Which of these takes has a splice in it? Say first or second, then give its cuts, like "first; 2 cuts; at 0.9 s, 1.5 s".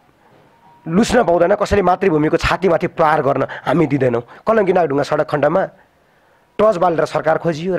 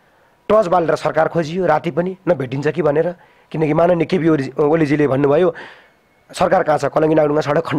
first; 1 cut; at 4.3 s